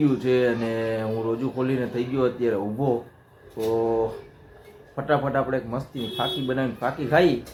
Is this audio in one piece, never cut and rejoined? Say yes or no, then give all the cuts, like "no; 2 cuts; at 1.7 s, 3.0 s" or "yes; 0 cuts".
yes; 0 cuts